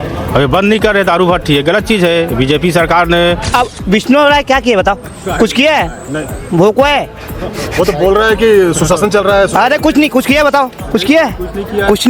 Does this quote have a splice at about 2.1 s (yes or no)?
no